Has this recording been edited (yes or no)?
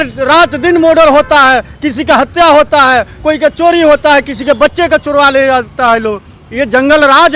no